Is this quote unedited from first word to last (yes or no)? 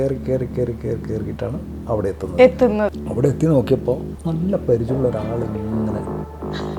no